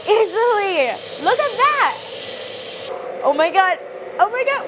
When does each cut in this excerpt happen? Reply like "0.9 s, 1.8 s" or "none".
2.9 s